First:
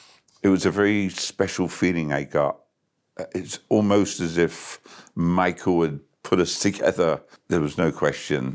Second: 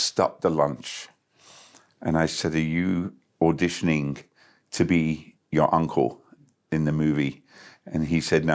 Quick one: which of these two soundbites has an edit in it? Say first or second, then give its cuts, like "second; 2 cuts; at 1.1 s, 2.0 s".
first; 1 cut; at 7.3 s